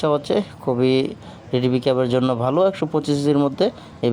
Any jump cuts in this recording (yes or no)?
no